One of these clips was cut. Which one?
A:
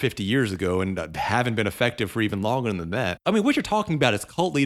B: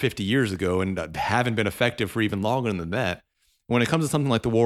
A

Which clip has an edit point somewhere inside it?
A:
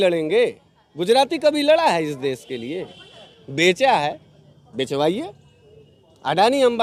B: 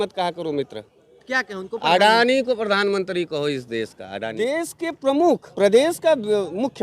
B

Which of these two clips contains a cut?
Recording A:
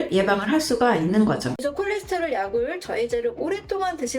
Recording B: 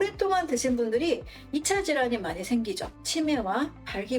A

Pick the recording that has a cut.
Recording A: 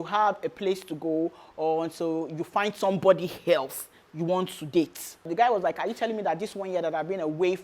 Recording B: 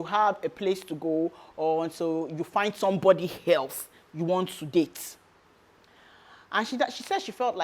A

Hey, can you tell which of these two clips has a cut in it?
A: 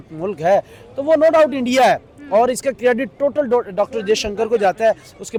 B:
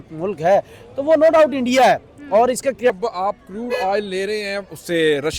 B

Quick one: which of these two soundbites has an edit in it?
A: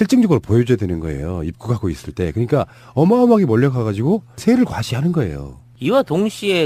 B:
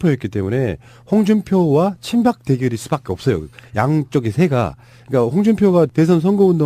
B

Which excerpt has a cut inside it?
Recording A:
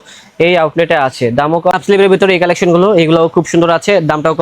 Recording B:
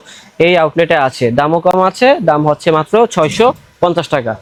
A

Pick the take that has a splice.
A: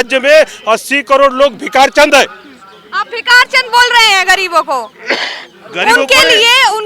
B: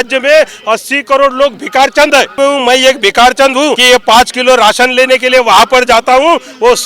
B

